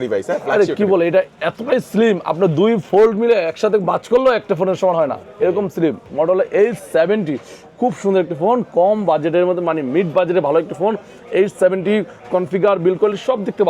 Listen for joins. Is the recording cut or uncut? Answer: cut